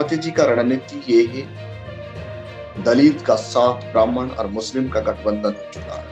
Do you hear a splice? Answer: no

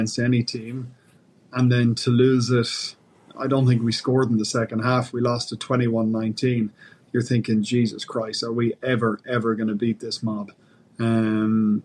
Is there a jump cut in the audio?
no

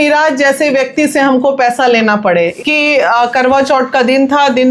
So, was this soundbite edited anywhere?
yes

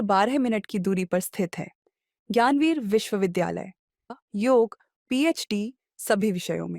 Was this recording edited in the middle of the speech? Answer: yes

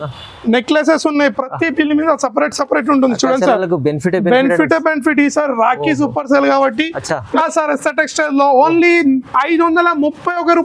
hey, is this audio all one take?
no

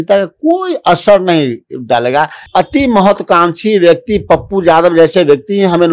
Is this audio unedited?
no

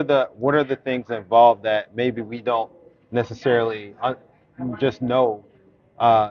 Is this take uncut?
yes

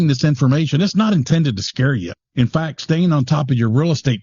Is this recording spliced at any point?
yes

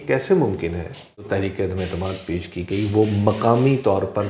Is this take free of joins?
no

